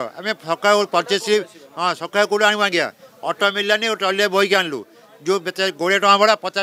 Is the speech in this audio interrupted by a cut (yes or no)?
no